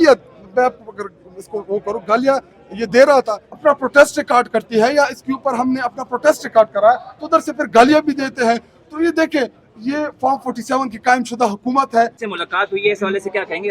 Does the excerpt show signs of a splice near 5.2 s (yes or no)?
no